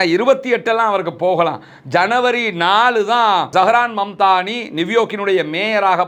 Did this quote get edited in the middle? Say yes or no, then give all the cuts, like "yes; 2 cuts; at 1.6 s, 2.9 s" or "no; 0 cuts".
no; 0 cuts